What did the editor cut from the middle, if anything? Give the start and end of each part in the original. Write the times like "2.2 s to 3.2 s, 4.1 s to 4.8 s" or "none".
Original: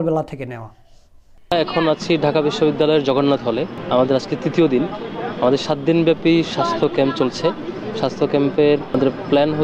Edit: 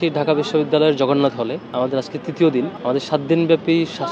3.7 s to 3.8 s, 4.9 s to 5.3 s